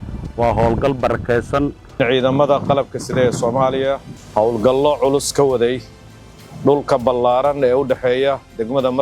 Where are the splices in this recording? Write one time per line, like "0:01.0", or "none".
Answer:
0:02.0
0:04.1